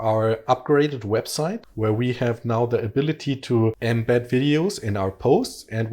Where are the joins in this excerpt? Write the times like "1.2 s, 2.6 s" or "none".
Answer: 1.7 s, 3.8 s